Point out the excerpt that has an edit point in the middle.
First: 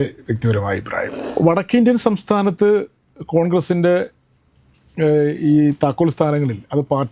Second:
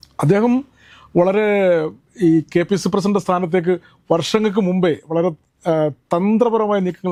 first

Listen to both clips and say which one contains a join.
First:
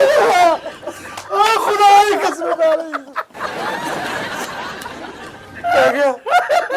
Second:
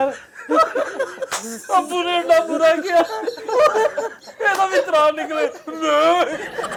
first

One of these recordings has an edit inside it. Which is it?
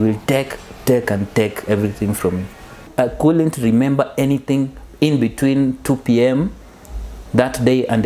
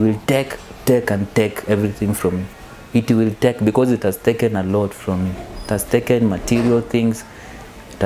first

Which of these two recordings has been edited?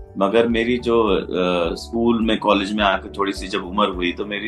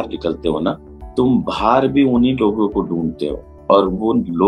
second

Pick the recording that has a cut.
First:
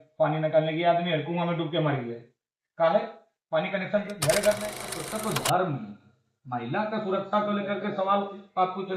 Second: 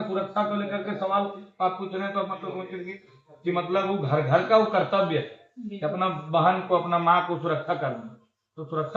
first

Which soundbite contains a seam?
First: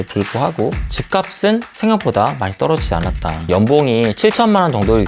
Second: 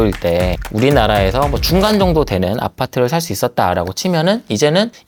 first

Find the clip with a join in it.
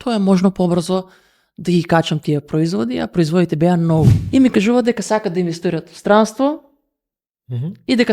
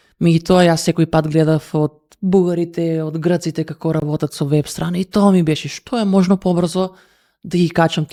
first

